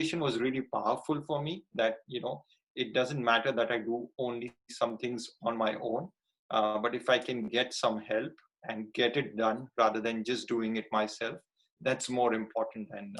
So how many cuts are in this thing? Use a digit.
0